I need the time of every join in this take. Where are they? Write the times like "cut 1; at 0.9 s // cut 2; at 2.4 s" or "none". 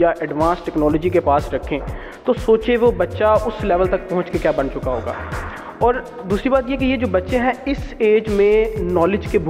none